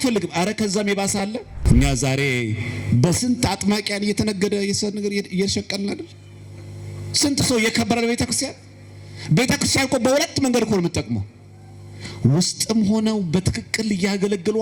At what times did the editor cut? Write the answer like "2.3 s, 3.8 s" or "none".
1.6 s